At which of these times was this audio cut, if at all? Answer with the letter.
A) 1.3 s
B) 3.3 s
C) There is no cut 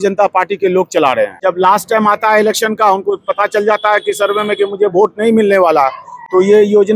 A